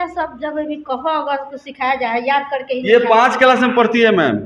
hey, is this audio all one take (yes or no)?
yes